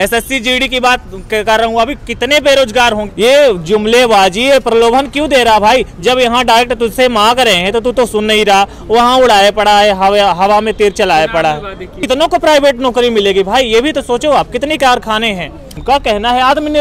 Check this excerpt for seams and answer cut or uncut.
cut